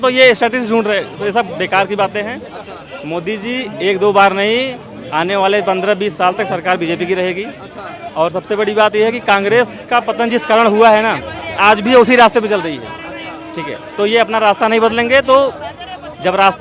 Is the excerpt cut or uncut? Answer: uncut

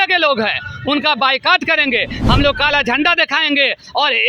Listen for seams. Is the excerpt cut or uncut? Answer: cut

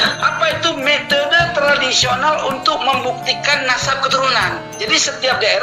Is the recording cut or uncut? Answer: cut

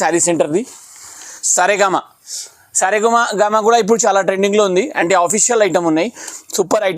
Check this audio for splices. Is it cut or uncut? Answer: cut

